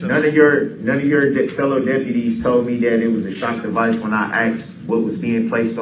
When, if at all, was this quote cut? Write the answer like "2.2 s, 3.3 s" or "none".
none